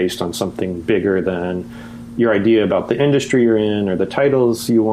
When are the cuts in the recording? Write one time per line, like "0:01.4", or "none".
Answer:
none